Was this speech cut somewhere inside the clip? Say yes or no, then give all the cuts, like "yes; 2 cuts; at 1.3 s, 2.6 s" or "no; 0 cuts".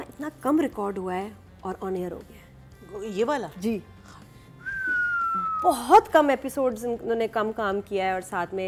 no; 0 cuts